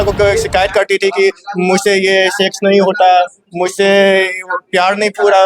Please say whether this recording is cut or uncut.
uncut